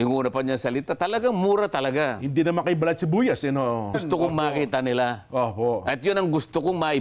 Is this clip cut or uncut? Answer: cut